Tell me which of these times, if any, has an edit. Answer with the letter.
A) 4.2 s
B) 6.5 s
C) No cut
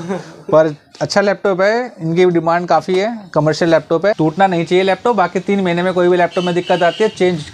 A